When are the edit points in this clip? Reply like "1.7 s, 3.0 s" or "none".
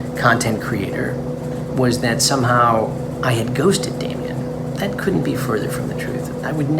4.5 s